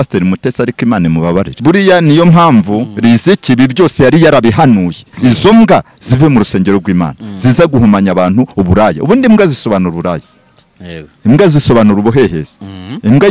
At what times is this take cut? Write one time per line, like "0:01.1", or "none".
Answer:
0:01.5
0:05.0